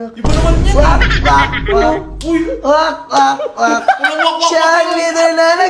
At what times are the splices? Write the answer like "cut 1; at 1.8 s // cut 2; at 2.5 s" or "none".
none